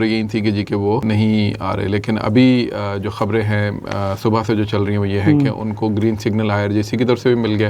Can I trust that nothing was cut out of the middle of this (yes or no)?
no